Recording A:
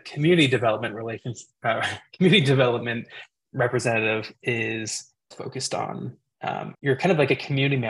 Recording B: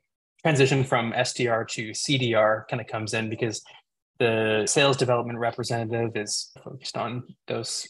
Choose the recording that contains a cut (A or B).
B